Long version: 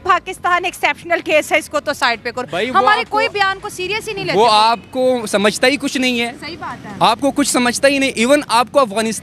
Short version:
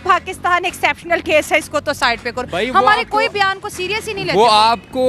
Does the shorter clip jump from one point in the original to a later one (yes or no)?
no